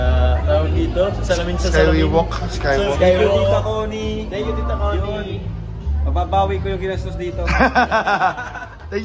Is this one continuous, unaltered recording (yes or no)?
yes